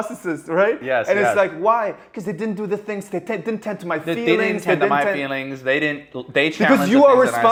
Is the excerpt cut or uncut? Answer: uncut